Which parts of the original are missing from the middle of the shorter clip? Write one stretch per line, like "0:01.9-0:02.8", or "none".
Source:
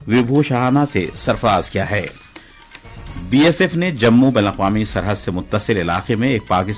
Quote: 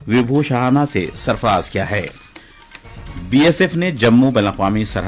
none